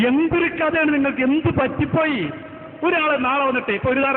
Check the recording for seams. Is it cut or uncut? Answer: uncut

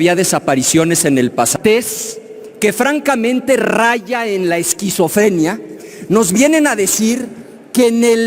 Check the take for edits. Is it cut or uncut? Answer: cut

